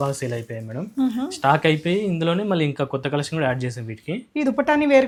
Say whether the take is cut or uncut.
uncut